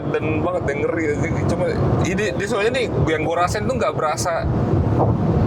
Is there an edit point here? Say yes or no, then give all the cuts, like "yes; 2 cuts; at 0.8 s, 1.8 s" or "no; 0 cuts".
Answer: no; 0 cuts